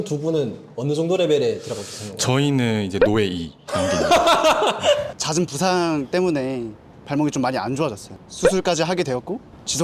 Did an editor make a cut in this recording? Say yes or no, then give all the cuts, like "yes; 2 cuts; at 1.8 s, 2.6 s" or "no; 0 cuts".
yes; 1 cut; at 5.1 s